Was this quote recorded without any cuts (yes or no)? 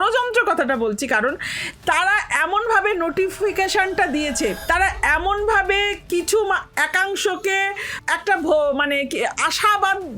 no